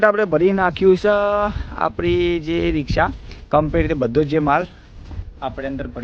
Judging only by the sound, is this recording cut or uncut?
uncut